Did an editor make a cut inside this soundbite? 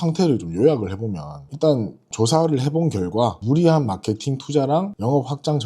yes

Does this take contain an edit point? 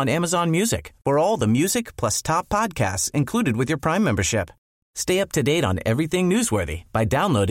no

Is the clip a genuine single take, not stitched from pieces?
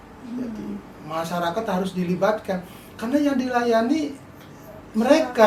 yes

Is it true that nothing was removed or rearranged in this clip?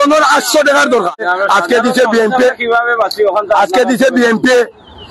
no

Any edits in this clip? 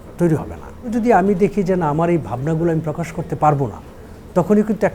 yes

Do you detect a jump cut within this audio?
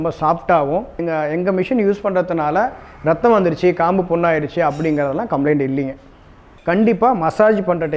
yes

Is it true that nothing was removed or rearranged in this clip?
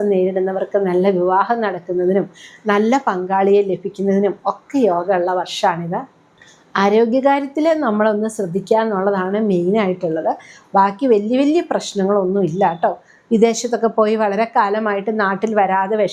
yes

